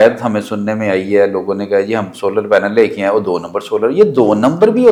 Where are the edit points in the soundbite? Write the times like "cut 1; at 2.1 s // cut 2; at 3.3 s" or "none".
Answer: none

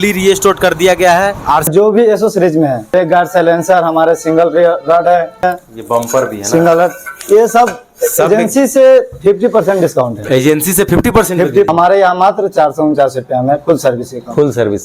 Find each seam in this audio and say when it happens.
cut 1; at 1.7 s // cut 2; at 2.9 s // cut 3; at 5.4 s // cut 4; at 11.7 s

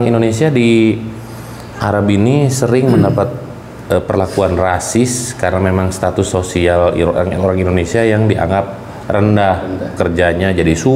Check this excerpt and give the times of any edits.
none

